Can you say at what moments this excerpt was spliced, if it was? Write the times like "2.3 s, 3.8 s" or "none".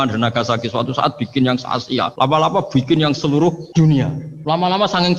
2.1 s, 3.9 s